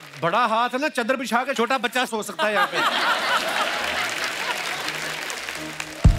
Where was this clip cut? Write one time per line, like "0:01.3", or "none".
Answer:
none